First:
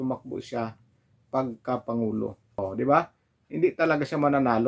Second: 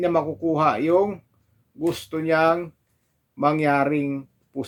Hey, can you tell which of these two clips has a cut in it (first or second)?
first